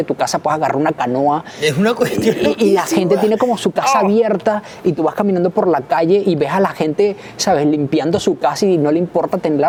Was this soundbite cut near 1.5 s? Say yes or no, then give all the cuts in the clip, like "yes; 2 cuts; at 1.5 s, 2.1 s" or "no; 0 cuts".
no; 0 cuts